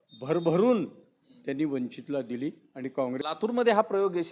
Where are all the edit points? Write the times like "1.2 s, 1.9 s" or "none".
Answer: 3.2 s